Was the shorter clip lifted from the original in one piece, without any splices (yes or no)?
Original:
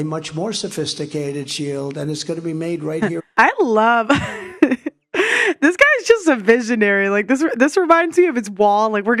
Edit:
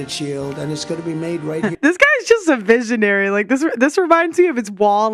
no